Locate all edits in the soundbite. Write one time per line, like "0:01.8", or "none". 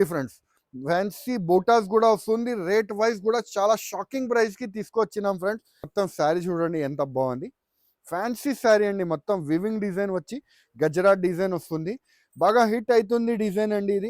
0:05.8